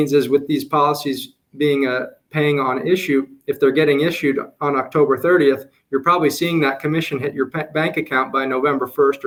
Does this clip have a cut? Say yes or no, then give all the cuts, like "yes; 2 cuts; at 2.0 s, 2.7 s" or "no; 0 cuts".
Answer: no; 0 cuts